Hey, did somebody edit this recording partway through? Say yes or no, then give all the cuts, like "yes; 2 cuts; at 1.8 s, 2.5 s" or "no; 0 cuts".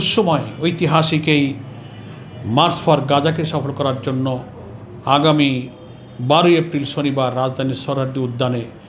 no; 0 cuts